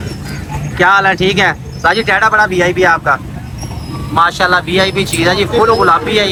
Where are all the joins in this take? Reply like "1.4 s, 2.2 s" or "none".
none